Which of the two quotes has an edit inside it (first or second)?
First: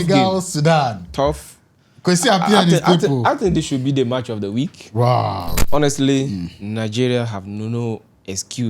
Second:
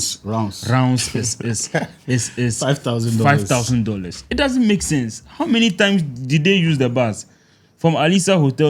first